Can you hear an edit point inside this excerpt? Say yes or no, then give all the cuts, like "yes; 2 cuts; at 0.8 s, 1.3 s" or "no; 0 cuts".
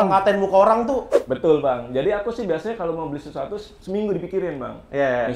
yes; 1 cut; at 1.1 s